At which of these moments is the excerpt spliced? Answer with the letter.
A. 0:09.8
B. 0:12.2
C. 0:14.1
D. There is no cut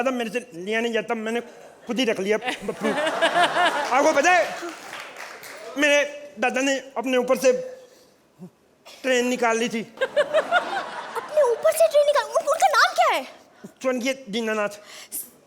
D